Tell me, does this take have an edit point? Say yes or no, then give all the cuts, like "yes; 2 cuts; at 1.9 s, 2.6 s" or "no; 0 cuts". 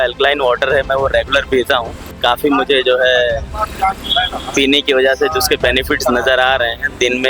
yes; 1 cut; at 2.2 s